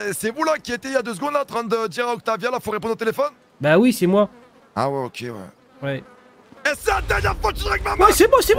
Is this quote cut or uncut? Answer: uncut